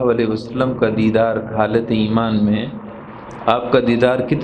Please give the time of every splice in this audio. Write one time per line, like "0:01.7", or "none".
none